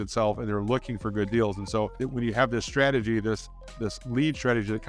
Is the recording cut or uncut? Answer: cut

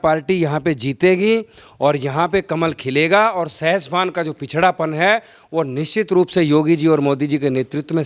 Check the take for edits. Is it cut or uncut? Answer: uncut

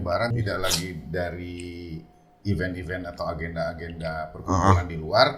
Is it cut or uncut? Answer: uncut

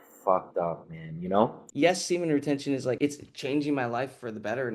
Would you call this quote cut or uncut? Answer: cut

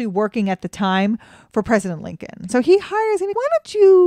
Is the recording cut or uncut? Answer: cut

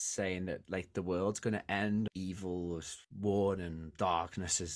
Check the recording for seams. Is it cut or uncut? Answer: cut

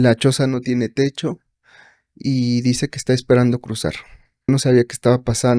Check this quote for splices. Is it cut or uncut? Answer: cut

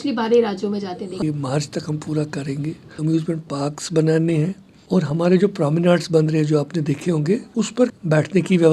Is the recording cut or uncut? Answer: cut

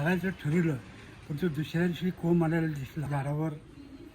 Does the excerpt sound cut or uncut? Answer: cut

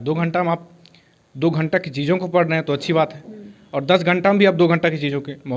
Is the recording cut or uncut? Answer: uncut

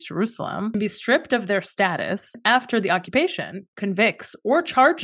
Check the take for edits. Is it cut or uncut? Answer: cut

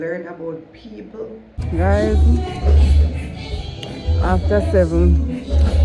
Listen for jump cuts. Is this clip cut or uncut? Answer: cut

